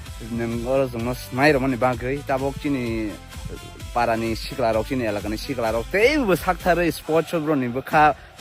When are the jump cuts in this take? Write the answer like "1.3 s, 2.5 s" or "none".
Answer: none